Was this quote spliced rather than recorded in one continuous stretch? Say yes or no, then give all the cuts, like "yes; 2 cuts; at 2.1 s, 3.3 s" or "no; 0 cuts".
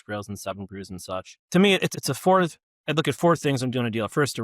yes; 2 cuts; at 1.4 s, 1.9 s